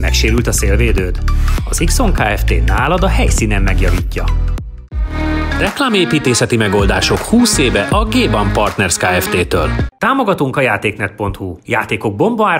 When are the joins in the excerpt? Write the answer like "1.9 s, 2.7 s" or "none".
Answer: 4.9 s, 9.9 s